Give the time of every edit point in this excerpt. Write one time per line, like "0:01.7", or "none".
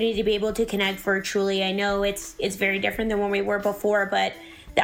none